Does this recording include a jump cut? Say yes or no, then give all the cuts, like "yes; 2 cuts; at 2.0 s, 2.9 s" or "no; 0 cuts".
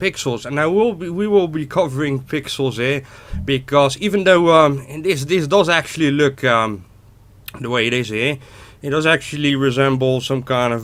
no; 0 cuts